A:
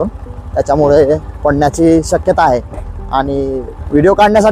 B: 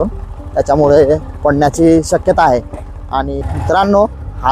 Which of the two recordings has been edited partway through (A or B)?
B